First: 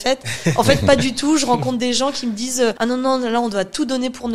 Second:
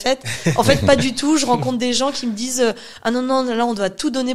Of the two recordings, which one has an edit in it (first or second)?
first